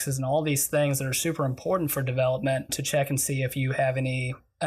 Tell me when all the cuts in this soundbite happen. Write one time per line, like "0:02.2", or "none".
0:02.8